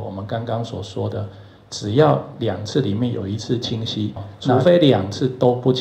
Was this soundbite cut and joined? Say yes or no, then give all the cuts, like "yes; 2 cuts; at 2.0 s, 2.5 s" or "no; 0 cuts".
yes; 1 cut; at 4.5 s